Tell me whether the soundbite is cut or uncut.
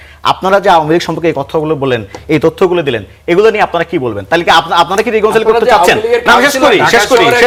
uncut